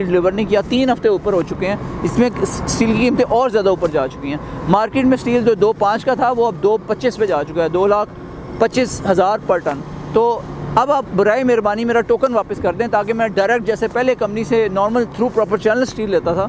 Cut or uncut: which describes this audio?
uncut